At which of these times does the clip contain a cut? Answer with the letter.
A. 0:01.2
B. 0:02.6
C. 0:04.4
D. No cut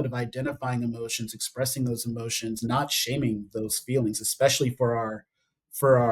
B